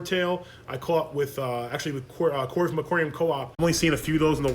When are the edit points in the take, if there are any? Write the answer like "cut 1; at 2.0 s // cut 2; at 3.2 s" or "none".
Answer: cut 1; at 3.6 s